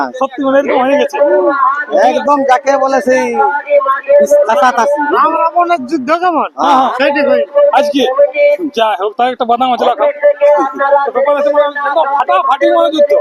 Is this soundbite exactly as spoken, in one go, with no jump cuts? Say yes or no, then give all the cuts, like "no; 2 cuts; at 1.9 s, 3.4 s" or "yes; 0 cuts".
yes; 0 cuts